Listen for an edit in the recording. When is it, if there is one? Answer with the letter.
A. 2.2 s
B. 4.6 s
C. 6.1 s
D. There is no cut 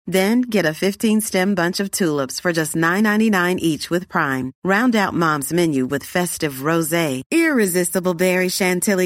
D